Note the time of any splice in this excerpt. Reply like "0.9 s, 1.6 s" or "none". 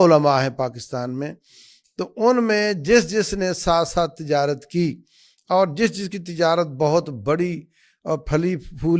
none